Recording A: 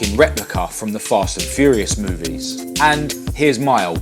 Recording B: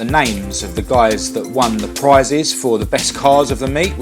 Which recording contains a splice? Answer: A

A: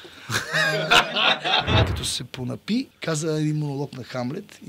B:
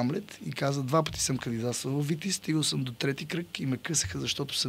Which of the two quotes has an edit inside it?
A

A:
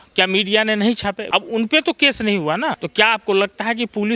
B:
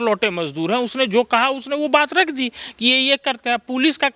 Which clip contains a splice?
A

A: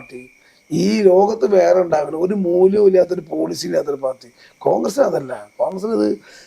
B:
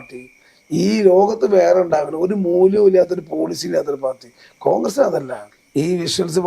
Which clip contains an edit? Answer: B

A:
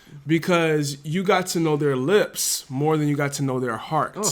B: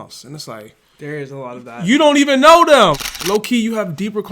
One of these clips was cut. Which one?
B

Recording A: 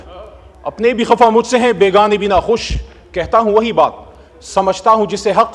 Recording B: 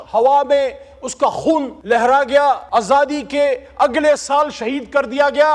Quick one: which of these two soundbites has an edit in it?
B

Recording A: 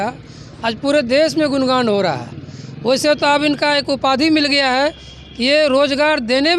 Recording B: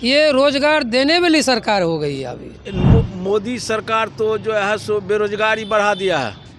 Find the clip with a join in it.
B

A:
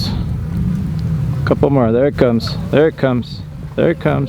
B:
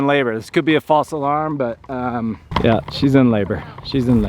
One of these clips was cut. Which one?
B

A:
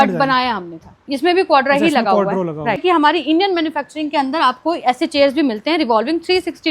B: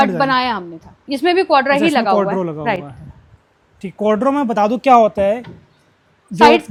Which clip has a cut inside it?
A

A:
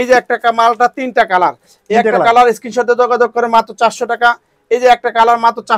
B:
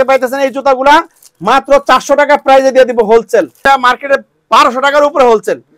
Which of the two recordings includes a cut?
B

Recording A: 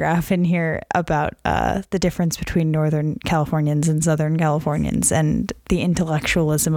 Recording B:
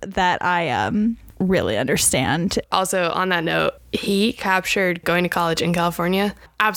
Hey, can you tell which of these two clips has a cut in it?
B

